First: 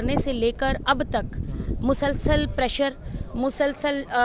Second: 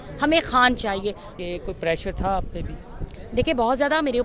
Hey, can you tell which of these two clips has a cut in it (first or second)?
second